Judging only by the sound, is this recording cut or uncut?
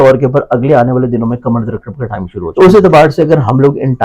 cut